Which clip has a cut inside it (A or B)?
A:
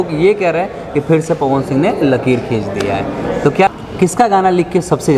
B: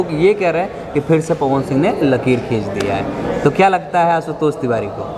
A